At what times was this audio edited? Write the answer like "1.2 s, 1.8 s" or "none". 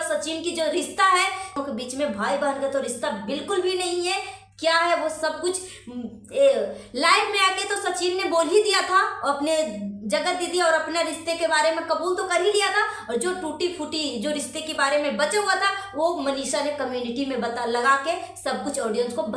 1.6 s

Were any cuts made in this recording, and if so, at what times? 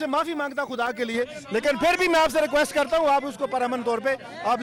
none

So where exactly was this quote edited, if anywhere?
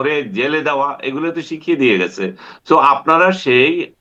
none

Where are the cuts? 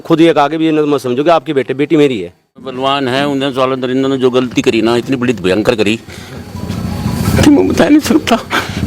2.7 s

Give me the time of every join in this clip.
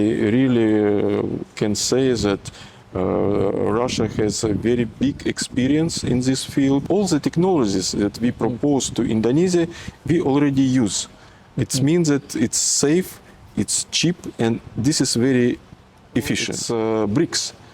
6.9 s, 16.5 s

